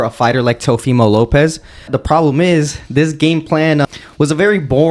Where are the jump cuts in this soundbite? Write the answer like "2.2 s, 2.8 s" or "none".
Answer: 1.9 s, 3.8 s